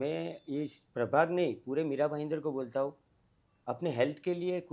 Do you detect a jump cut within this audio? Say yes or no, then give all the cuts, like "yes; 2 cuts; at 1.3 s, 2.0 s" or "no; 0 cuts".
no; 0 cuts